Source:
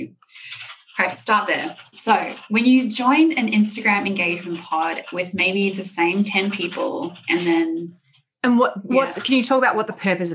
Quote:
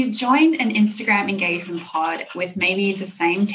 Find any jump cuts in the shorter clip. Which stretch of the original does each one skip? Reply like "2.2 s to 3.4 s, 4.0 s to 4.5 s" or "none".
none